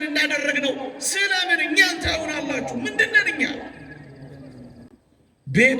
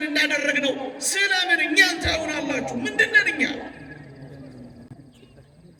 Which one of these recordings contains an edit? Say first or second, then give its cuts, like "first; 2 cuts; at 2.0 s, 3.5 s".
first; 1 cut; at 4.9 s